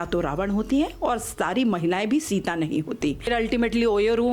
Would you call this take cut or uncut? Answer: cut